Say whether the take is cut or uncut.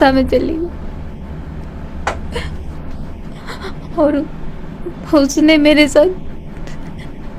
uncut